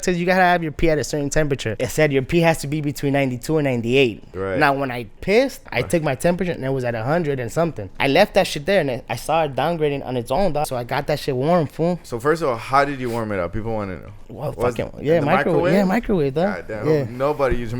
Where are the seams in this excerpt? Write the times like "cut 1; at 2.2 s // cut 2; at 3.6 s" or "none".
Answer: cut 1; at 1.7 s // cut 2; at 4.3 s // cut 3; at 5.7 s // cut 4; at 7.9 s // cut 5; at 10.7 s // cut 6; at 12.0 s